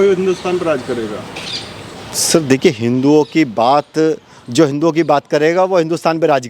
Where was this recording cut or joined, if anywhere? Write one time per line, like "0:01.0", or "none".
none

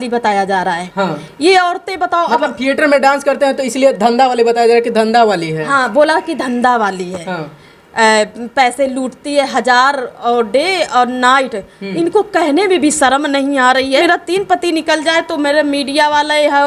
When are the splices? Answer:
0:14.0

